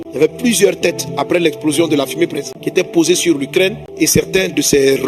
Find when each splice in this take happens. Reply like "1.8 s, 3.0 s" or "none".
2.5 s, 3.8 s